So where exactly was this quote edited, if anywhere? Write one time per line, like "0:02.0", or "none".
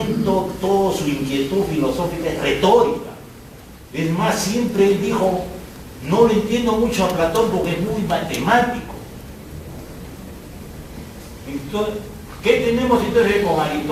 none